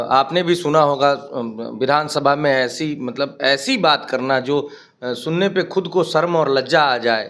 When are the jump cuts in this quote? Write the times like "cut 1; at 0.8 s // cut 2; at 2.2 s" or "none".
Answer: none